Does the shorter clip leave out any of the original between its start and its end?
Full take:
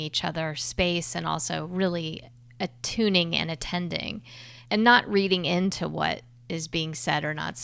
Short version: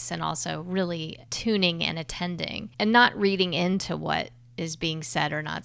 yes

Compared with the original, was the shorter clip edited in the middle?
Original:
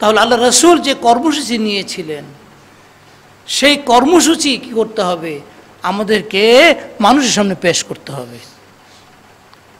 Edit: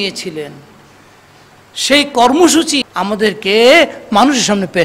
yes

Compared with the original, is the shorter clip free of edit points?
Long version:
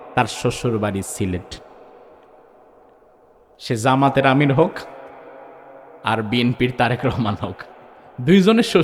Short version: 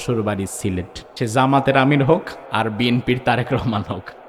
no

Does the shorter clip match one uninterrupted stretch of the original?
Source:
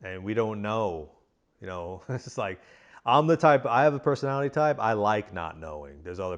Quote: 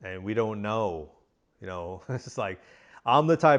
yes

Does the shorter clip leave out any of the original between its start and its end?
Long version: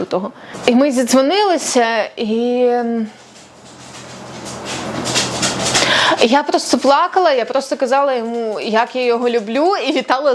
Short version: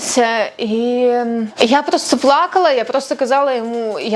yes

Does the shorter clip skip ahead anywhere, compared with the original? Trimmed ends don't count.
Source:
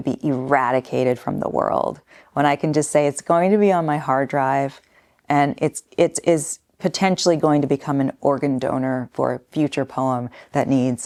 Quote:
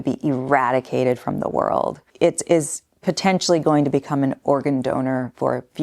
yes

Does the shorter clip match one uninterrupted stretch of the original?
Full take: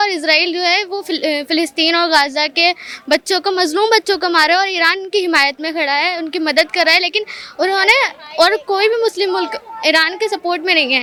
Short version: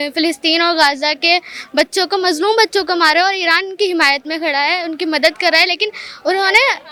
yes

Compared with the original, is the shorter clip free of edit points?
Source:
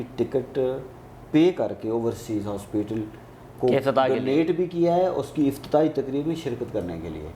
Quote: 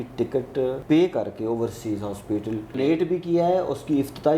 no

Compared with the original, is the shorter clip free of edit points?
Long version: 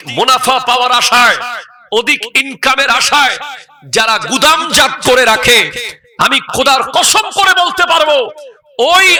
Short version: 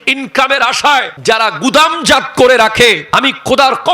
no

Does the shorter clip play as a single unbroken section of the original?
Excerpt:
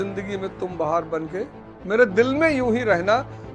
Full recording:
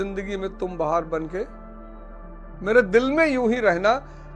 no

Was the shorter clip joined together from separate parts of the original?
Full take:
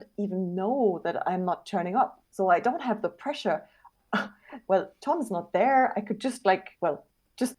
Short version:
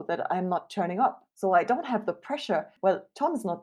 yes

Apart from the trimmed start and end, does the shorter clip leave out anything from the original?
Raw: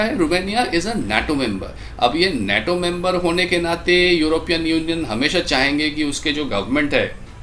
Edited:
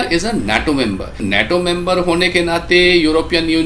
yes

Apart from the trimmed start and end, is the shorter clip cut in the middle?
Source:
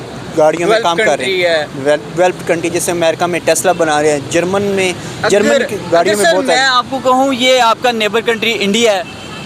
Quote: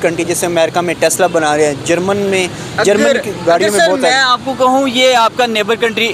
no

